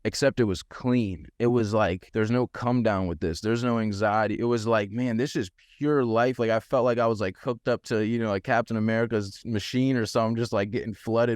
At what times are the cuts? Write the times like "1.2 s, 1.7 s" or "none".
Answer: none